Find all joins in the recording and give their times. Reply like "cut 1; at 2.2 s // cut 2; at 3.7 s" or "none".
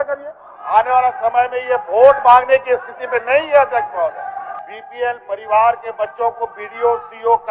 cut 1; at 4.7 s